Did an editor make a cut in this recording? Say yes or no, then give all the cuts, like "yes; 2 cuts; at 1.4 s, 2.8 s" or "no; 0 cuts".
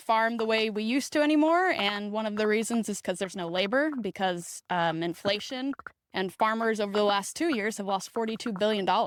no; 0 cuts